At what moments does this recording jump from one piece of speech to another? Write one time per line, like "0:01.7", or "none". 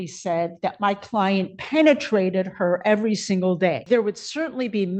0:03.8